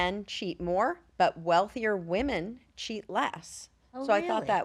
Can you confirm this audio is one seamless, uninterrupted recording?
yes; 0 cuts

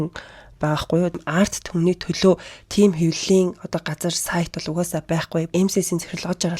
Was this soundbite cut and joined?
yes; 2 cuts; at 1.2 s, 5.5 s

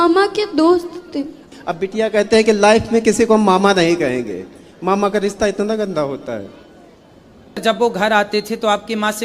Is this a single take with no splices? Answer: no; 2 cuts; at 1.4 s, 7.6 s

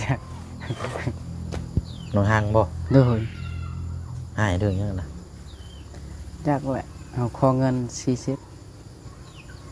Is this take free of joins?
yes; 0 cuts

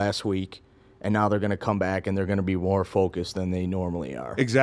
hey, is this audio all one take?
yes; 0 cuts

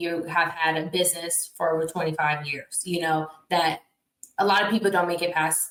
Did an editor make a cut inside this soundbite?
no; 0 cuts

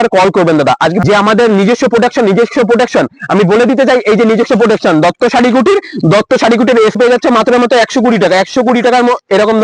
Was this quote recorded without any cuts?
no; 2 cuts; at 1.0 s, 7.0 s

